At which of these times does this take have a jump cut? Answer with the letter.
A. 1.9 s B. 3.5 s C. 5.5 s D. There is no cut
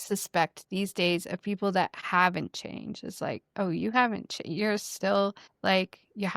C